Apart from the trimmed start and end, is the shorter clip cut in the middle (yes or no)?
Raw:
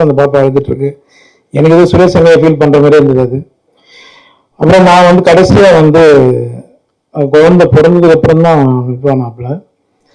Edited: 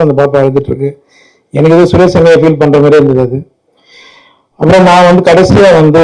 no